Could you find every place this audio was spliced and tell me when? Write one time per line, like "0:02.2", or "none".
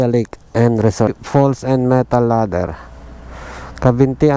0:01.2